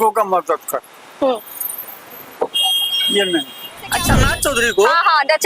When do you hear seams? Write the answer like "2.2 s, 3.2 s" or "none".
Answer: 4.2 s